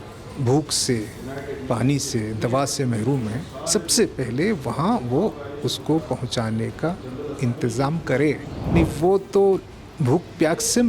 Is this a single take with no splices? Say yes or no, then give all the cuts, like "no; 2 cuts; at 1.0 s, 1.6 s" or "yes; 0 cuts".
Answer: no; 1 cut; at 8.7 s